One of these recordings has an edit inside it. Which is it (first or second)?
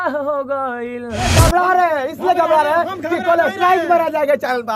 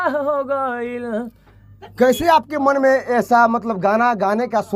first